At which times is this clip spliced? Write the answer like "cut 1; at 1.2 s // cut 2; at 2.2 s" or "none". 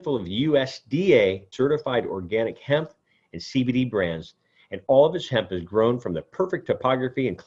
cut 1; at 1.5 s